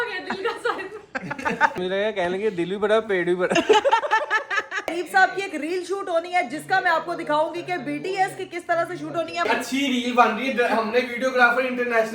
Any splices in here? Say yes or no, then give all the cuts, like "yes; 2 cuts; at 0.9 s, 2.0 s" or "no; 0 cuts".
yes; 3 cuts; at 1.8 s, 4.9 s, 9.5 s